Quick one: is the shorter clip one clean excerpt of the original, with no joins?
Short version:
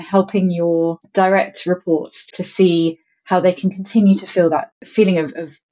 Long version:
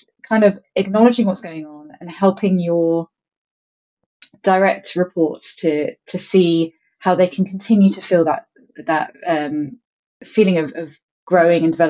no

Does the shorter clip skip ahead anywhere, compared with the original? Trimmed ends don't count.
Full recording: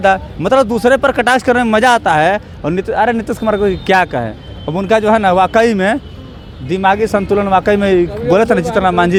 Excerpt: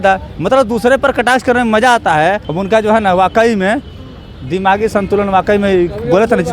yes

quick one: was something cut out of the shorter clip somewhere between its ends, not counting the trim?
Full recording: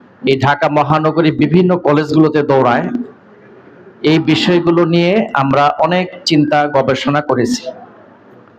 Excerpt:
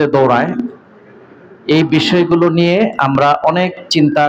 no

